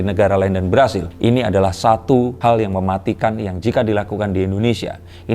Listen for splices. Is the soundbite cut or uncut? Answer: cut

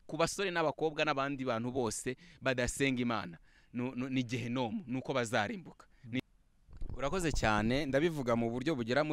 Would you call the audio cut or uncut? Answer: cut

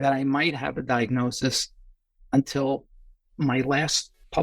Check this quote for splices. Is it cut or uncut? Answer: cut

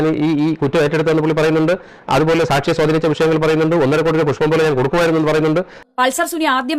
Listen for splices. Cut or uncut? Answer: cut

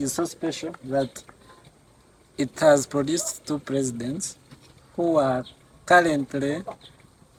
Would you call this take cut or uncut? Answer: uncut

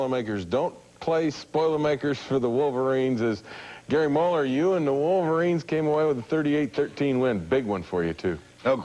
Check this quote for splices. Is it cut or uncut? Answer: uncut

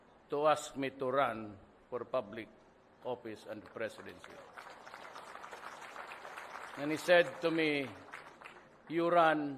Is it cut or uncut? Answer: uncut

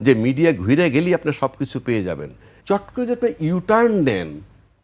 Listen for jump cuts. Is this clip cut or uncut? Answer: cut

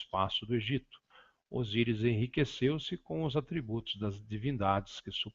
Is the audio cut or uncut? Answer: cut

